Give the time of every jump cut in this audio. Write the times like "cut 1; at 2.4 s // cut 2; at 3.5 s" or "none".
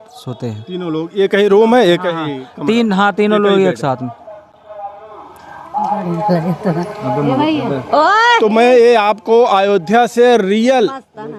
none